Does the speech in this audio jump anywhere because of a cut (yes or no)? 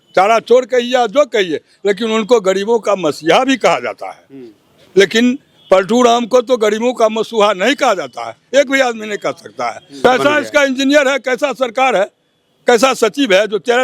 yes